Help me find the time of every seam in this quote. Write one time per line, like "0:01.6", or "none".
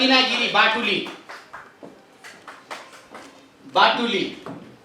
none